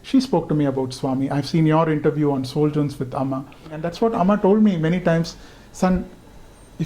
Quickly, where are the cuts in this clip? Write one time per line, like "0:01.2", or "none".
0:03.8